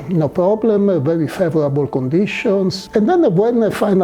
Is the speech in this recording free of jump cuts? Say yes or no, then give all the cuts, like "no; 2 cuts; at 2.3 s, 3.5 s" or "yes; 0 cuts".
no; 1 cut; at 2.8 s